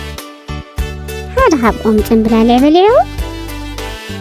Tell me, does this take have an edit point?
yes; 2 cuts; at 1.0 s, 3.1 s

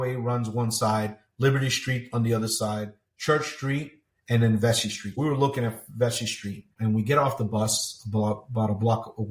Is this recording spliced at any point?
yes; 1 cut; at 5.1 s

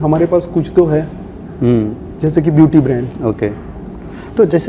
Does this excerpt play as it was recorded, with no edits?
yes; 0 cuts

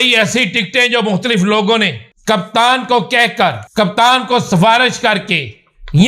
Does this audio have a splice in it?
yes; 2 cuts; at 2.1 s, 3.6 s

